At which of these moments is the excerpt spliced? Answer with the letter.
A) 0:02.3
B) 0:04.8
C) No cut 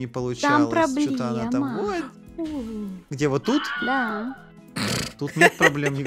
C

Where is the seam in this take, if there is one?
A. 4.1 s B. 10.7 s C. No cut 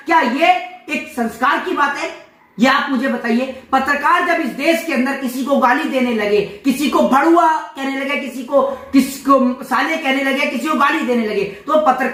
C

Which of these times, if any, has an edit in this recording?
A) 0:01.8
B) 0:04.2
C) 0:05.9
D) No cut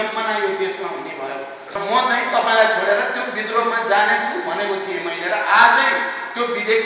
A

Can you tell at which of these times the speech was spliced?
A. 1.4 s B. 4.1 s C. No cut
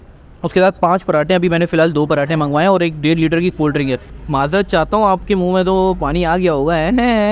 B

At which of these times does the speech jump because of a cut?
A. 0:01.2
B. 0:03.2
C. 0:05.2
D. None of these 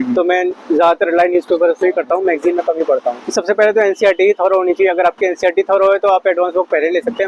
B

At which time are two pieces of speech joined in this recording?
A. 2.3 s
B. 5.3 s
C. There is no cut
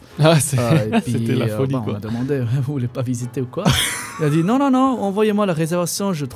C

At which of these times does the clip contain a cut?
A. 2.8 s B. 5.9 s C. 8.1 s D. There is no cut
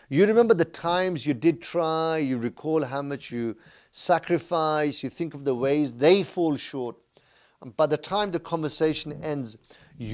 D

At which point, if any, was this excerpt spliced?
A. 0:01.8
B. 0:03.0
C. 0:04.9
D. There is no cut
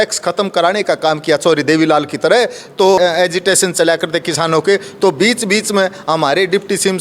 B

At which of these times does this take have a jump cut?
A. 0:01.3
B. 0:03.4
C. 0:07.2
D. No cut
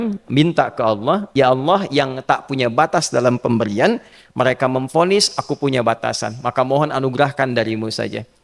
A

